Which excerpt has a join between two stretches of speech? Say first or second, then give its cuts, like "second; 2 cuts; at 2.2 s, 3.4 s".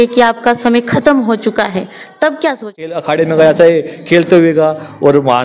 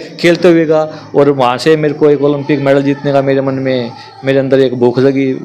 first; 1 cut; at 3.0 s